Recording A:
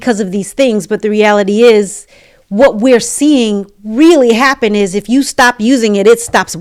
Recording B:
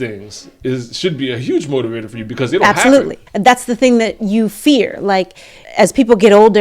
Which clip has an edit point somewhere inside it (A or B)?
B